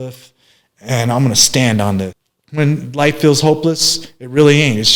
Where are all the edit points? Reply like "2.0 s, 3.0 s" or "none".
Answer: 2.2 s